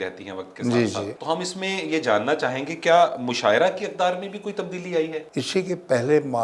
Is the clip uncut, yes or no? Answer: no